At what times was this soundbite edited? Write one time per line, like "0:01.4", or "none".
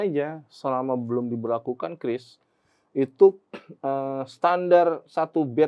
none